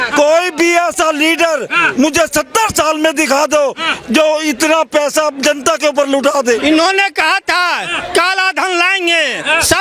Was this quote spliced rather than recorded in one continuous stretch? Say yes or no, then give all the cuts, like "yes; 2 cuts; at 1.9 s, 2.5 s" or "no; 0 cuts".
yes; 1 cut; at 6.6 s